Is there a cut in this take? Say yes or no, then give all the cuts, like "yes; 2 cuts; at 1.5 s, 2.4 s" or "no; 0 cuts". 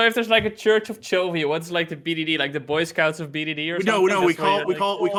no; 0 cuts